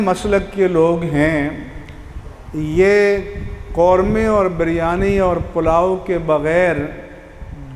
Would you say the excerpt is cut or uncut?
uncut